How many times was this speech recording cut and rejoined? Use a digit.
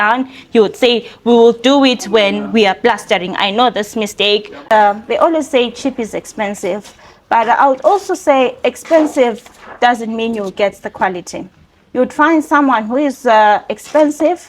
1